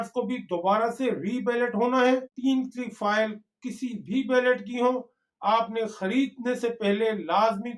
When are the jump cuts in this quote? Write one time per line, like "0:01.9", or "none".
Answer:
0:02.3